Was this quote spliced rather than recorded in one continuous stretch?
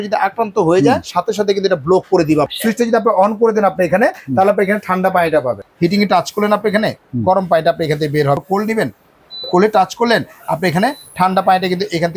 yes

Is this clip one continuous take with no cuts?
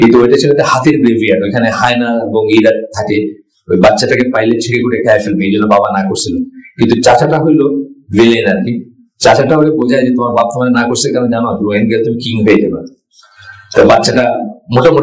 yes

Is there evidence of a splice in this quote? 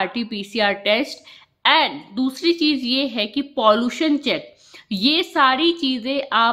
no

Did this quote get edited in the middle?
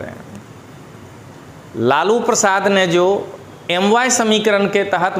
no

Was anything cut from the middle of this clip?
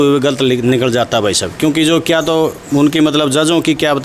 no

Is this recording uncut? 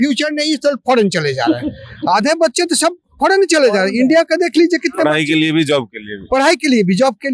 yes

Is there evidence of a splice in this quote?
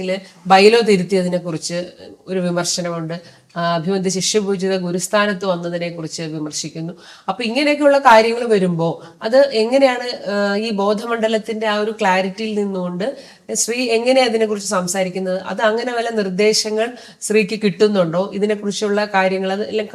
no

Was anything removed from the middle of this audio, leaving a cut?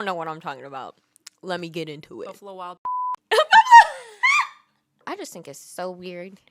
yes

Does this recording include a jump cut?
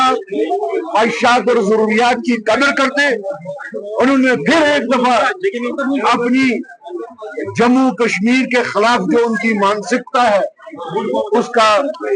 no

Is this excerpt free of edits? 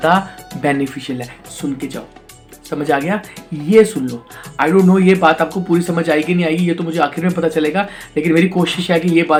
yes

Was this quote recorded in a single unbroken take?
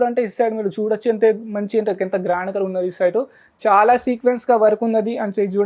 yes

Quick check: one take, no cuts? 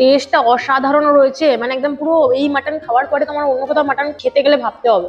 no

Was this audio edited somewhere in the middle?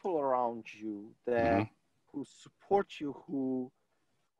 no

